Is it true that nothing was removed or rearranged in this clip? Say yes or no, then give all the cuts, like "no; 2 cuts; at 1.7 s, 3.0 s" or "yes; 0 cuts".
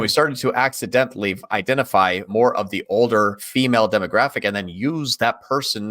no; 2 cuts; at 2.2 s, 3.4 s